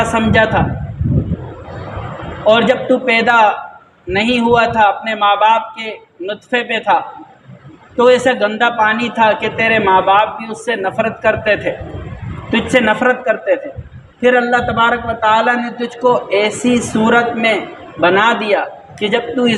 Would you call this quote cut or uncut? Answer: uncut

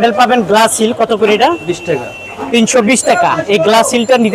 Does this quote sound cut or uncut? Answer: uncut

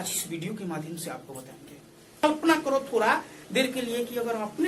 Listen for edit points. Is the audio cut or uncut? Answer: cut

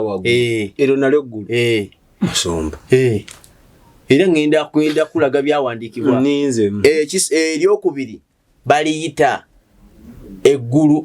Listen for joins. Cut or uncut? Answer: uncut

